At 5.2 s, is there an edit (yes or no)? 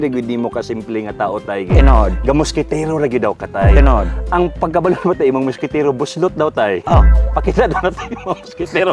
no